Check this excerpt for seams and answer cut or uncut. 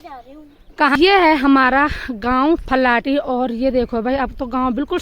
cut